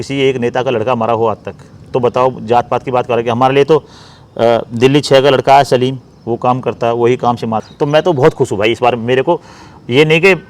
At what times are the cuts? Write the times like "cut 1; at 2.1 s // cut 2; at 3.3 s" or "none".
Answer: cut 1; at 7.7 s